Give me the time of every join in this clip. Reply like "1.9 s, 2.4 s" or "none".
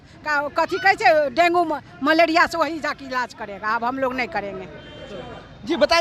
none